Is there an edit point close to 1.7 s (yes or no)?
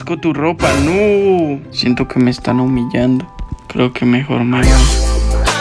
yes